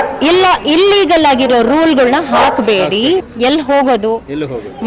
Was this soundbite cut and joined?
yes; 1 cut; at 3.2 s

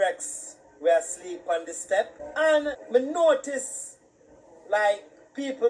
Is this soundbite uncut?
no; 2 cuts; at 2.2 s, 2.8 s

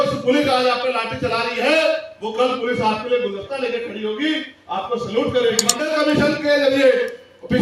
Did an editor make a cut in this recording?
yes; 1 cut; at 5.8 s

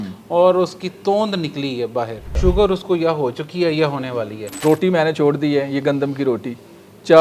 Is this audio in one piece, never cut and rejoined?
no; 2 cuts; at 2.2 s, 4.4 s

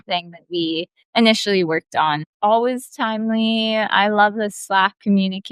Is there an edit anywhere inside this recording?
yes; 2 cuts; at 1.0 s, 2.3 s

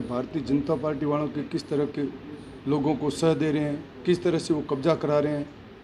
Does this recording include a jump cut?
no; 0 cuts

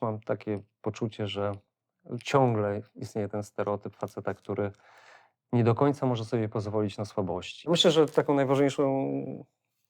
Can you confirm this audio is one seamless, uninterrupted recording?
no; 1 cut; at 7.7 s

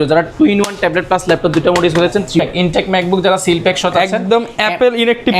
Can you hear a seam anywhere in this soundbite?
yes; 1 cut; at 2.4 s

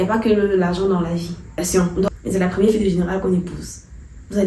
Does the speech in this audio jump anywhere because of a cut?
yes; 1 cut; at 1.6 s

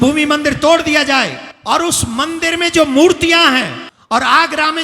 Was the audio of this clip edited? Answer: yes; 2 cuts; at 1.5 s, 3.9 s

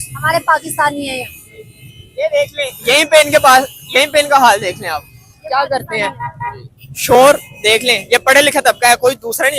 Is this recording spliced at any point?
no; 0 cuts

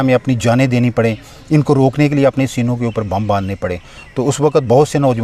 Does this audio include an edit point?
no; 0 cuts

